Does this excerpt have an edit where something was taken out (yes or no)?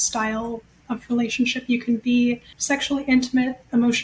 yes